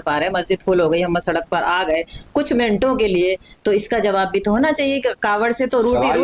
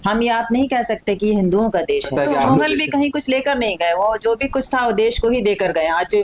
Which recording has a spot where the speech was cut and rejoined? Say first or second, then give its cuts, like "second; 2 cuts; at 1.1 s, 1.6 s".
second; 1 cut; at 2.1 s